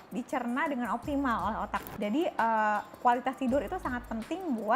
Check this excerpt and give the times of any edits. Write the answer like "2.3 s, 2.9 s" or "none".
1.8 s

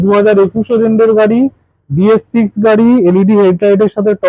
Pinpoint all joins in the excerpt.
none

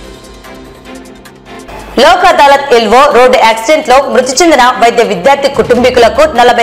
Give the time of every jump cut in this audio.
1.6 s

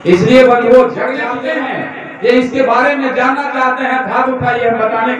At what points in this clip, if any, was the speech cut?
1.3 s

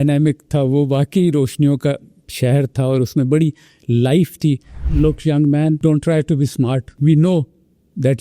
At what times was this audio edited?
4.8 s, 5.8 s, 6.9 s

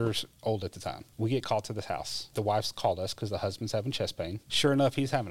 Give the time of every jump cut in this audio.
1.0 s, 2.3 s, 4.4 s

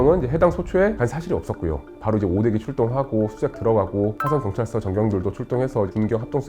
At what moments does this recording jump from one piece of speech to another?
1.8 s

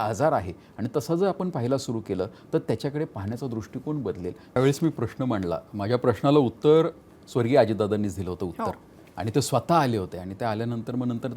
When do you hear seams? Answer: 4.6 s

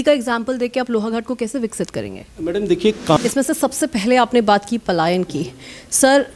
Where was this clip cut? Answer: 3.2 s

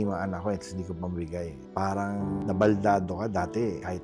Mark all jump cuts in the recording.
1.6 s

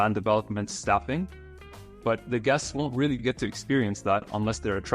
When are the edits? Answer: none

